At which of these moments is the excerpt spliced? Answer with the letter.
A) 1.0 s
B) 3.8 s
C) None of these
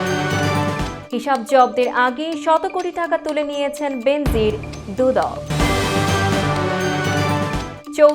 A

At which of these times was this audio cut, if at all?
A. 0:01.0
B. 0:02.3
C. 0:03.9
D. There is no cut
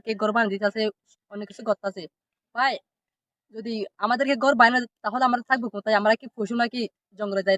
D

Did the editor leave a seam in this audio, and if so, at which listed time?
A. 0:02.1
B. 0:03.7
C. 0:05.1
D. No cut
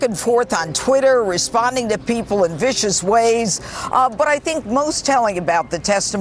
B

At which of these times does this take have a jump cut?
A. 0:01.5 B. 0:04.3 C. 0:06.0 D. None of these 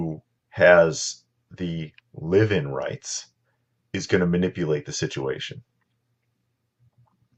D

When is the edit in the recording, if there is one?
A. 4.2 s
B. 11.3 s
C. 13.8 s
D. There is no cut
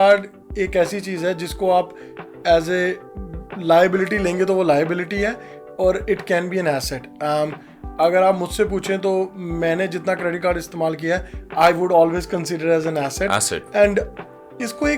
D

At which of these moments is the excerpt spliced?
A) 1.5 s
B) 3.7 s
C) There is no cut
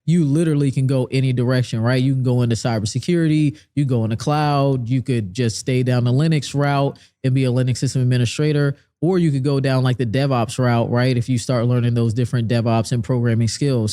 C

